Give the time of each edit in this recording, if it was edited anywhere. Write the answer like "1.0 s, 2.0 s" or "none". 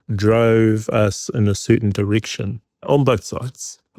2.8 s

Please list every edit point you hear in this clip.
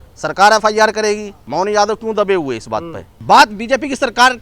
1.4 s, 3.1 s

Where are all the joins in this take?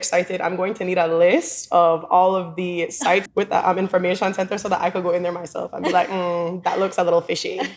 3.3 s

